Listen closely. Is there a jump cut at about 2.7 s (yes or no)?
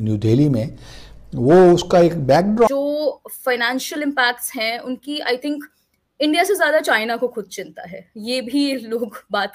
yes